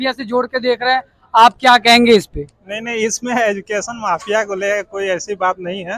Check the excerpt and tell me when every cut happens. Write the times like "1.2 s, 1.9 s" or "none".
none